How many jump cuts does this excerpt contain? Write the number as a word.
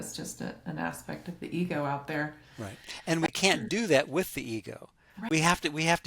two